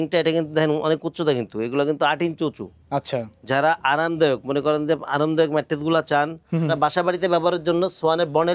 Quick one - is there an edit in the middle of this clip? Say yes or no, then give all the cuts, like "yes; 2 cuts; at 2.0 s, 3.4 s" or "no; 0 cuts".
yes; 1 cut; at 6.7 s